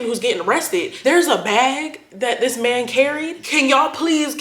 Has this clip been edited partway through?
yes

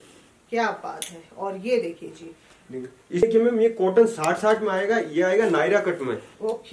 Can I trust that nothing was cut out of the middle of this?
no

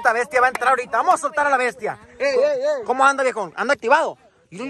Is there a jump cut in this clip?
no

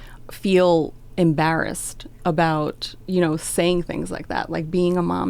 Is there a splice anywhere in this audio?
no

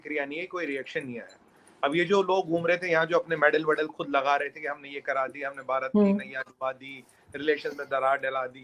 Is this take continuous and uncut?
yes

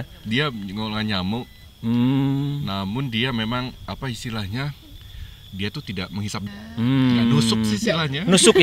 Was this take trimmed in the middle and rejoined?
yes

